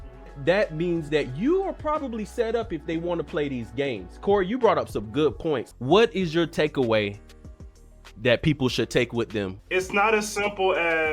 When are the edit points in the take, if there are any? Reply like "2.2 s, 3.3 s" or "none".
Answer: 5.7 s, 9.6 s